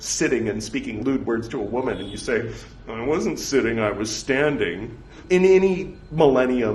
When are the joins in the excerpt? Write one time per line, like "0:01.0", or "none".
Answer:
0:01.0
0:05.2